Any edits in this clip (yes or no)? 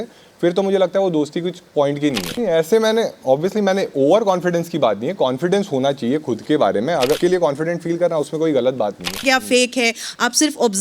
yes